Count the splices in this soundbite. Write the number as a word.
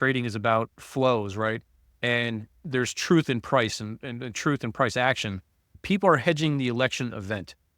one